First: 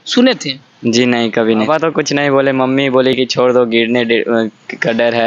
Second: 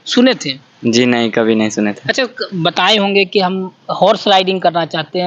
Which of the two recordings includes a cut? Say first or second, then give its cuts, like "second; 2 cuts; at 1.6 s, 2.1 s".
first; 1 cut; at 1.7 s